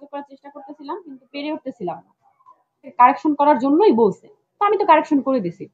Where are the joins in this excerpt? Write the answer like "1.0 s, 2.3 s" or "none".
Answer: 2.9 s